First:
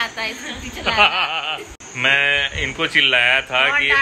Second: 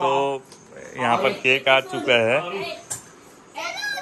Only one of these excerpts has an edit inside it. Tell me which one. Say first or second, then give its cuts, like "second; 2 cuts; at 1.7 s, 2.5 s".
first; 1 cut; at 1.8 s